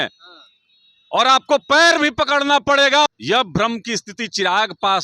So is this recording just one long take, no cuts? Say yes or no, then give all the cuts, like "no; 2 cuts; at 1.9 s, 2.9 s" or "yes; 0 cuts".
no; 1 cut; at 3.1 s